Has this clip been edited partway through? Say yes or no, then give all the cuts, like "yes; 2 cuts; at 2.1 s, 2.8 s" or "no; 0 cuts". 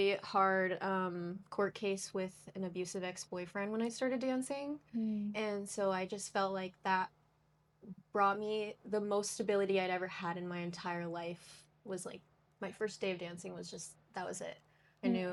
no; 0 cuts